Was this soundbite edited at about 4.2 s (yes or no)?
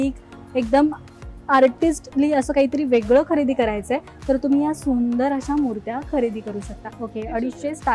no